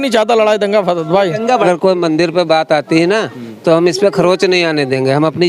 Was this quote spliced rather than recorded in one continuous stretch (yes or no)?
yes